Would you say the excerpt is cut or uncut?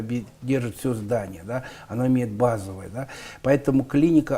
uncut